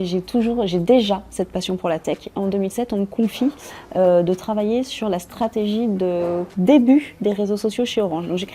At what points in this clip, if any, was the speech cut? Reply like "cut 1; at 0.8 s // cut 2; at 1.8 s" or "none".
cut 1; at 6.5 s

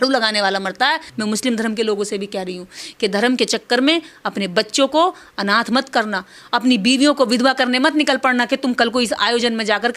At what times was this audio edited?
cut 1; at 1.1 s

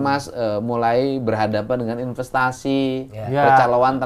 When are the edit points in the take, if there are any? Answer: none

